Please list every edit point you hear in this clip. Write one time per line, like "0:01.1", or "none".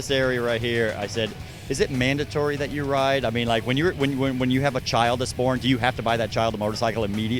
none